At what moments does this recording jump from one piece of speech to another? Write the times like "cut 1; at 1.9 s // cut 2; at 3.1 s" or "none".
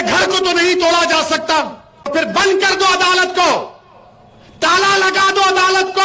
cut 1; at 2.1 s